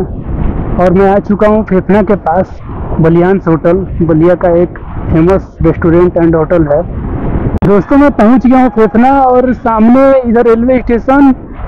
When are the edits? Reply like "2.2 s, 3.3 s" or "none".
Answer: none